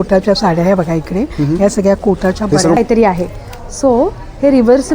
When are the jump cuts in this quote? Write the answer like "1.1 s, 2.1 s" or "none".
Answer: 2.8 s

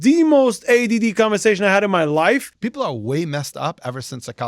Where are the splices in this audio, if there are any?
2.6 s

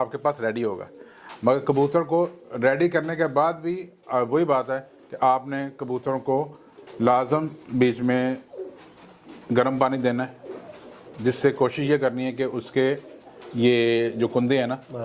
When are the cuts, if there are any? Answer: none

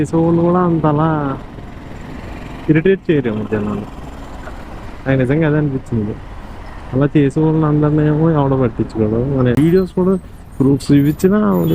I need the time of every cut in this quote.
9.6 s

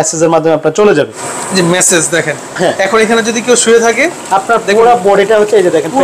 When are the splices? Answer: 1.2 s

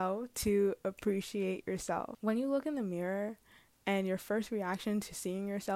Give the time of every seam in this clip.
2.1 s

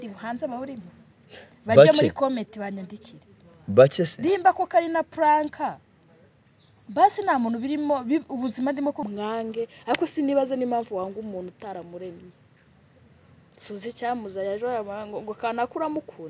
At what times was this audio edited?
9.0 s

